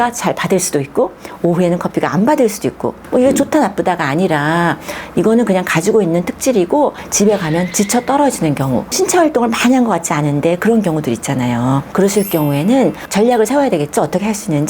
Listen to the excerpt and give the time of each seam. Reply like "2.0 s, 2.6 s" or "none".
7.0 s, 9.0 s, 11.9 s